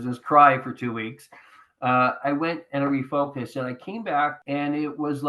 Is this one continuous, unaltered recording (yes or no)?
no